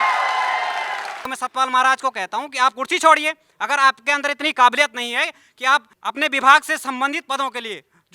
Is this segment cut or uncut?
cut